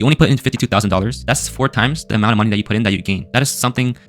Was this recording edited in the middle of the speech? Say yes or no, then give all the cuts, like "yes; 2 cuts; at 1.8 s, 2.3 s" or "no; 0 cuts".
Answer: no; 0 cuts